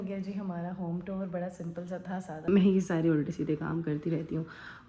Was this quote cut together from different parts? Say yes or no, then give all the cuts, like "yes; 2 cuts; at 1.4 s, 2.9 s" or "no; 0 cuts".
yes; 1 cut; at 2.3 s